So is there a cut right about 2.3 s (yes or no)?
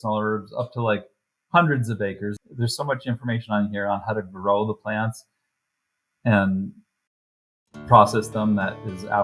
yes